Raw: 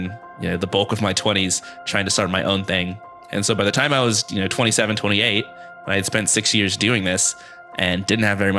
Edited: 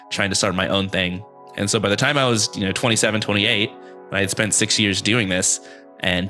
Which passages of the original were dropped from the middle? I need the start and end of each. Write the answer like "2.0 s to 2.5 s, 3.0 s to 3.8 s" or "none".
none